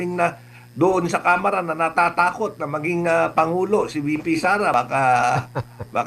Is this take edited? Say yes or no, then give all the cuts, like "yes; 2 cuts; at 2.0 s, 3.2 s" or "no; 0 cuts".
yes; 1 cut; at 4.7 s